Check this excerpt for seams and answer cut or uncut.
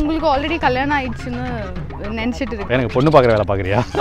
cut